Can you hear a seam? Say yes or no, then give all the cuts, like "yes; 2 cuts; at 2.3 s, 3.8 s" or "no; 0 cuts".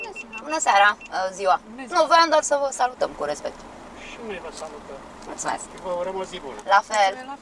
no; 0 cuts